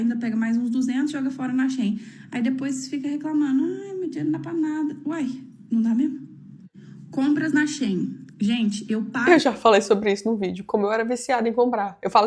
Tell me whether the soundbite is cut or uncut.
uncut